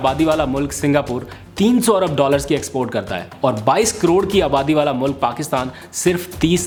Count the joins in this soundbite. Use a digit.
0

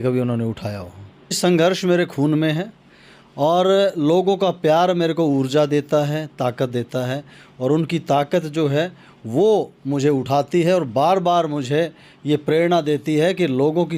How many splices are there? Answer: 1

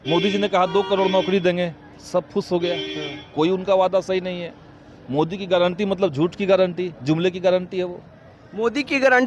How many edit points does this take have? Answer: 0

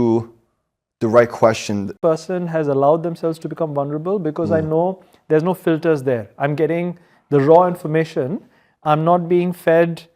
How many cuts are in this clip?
1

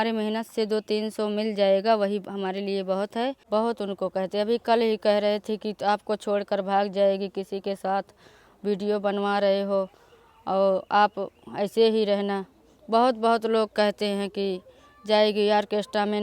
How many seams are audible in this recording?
1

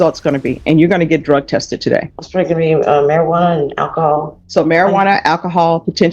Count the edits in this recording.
2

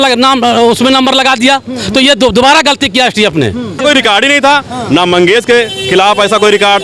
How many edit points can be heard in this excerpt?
1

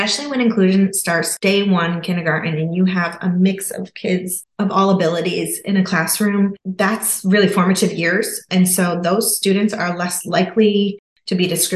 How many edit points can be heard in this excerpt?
1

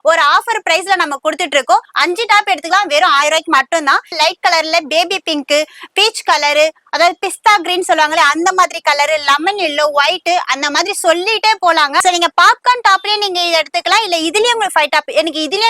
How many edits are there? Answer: 3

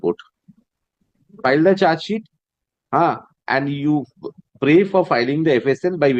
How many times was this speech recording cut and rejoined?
1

